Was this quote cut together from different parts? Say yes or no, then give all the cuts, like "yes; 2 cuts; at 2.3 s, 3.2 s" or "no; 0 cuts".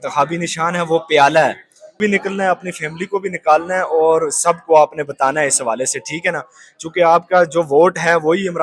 yes; 1 cut; at 1.9 s